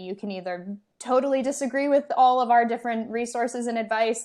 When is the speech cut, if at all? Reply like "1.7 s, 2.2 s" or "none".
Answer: none